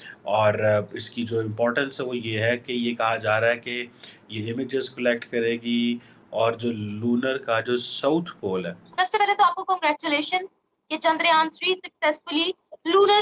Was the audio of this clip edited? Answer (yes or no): yes